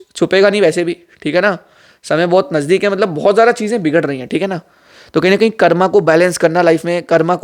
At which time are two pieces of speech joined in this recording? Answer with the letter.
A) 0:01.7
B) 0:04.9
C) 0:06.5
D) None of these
D